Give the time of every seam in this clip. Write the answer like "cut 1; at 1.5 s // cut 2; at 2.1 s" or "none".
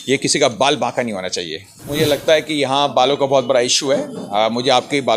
cut 1; at 1.8 s